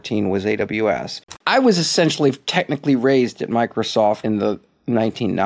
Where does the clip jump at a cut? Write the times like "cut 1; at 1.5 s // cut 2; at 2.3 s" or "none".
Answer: cut 1; at 1.4 s // cut 2; at 4.2 s